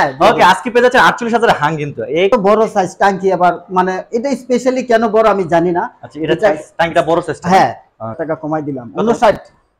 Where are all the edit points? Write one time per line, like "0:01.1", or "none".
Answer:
0:02.3
0:08.2